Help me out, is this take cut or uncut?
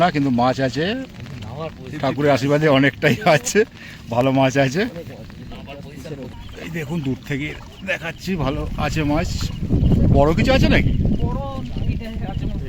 cut